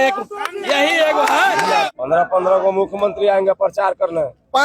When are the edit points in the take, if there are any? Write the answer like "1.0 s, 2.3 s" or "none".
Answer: 1.9 s